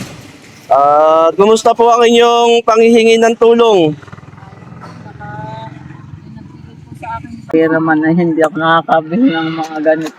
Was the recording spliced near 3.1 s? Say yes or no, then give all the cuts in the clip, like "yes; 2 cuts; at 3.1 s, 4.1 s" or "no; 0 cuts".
no; 1 cut; at 7.5 s